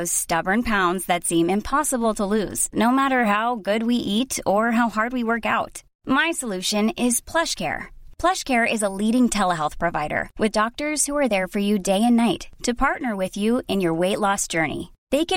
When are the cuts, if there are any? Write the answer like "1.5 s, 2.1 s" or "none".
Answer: none